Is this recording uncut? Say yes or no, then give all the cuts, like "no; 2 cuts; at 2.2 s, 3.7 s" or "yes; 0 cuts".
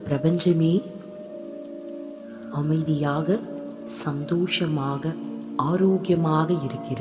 yes; 0 cuts